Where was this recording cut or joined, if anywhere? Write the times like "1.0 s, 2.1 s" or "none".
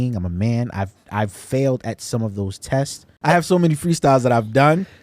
3.2 s